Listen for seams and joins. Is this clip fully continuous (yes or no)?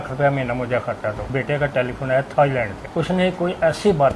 no